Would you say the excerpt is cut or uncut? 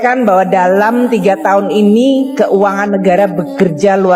uncut